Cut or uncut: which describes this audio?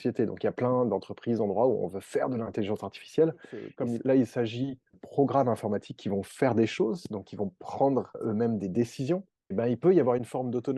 cut